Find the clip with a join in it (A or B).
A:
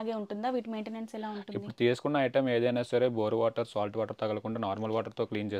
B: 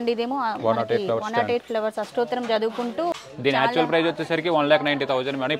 B